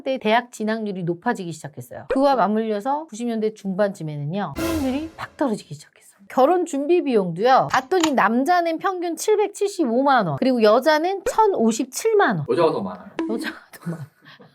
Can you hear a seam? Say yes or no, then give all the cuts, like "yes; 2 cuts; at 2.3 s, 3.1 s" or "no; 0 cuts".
yes; 2 cuts; at 5.2 s, 6.3 s